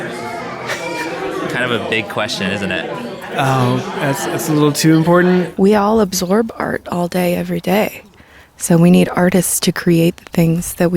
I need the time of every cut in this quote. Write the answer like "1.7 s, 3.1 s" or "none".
5.5 s